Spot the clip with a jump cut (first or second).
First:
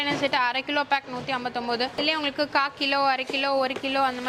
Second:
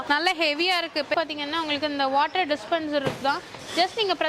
second